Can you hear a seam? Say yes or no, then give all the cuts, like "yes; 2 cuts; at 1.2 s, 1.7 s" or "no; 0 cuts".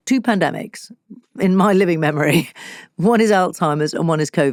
no; 0 cuts